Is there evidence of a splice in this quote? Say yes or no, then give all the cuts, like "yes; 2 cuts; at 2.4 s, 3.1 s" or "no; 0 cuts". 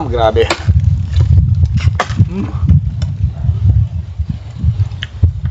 no; 0 cuts